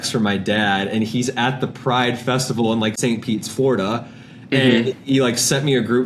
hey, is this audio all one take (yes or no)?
no